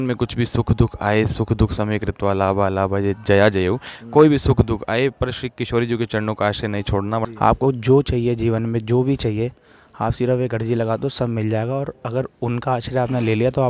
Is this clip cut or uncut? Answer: cut